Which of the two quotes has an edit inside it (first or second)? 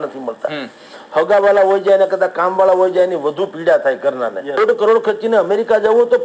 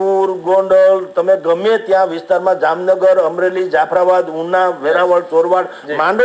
first